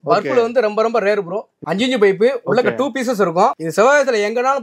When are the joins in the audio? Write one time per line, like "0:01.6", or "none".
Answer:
0:01.5
0:03.6